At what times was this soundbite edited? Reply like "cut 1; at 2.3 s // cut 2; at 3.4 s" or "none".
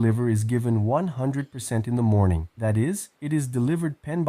cut 1; at 2.8 s